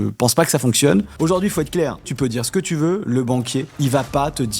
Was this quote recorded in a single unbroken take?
no; 3 cuts; at 1.1 s, 2.1 s, 3.7 s

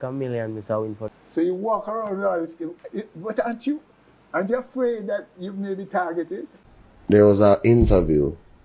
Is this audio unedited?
no; 2 cuts; at 1.0 s, 6.5 s

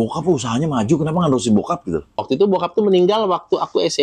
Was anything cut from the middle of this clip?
yes; 1 cut; at 2.2 s

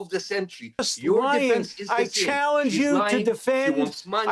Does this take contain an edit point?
yes; 1 cut; at 0.9 s

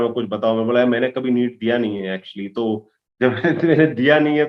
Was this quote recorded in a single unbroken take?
yes; 0 cuts

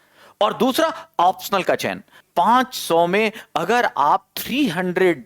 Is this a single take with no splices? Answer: no; 1 cut; at 2.2 s

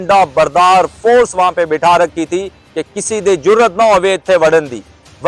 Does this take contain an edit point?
no; 0 cuts

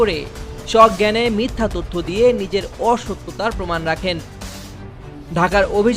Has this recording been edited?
yes; 1 cut; at 4.5 s

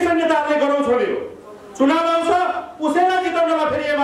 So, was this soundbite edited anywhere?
no; 0 cuts

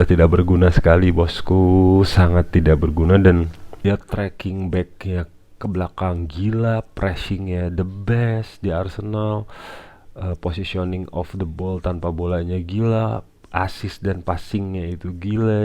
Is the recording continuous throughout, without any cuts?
no; 1 cut; at 3.8 s

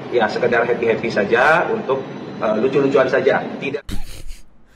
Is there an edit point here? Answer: yes; 1 cut; at 3.6 s

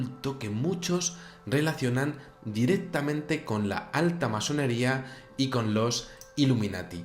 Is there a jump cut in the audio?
yes; 1 cut; at 3.3 s

